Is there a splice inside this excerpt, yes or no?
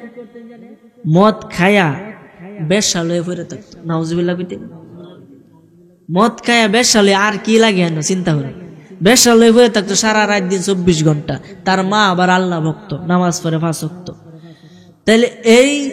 no